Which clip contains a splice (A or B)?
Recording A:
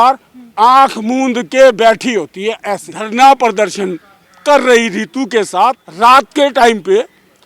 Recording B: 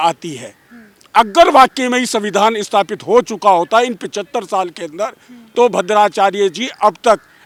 A